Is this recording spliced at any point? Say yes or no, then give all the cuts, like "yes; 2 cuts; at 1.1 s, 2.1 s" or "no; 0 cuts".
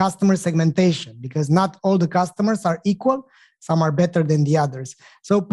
no; 0 cuts